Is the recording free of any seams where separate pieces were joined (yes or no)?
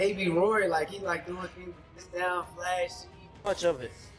no